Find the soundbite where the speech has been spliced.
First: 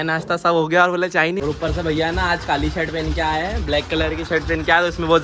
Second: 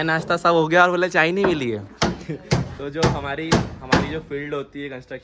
first; 1 cut; at 1.4 s

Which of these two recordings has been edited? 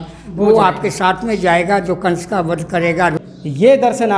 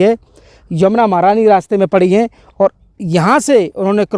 first; 1 cut; at 3.1 s

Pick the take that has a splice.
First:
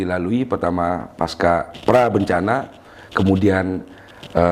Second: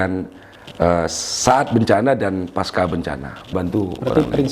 second; 1 cut; at 3.5 s

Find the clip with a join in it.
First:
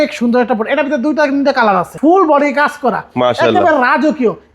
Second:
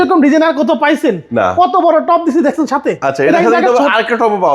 first; 1 cut; at 1.9 s

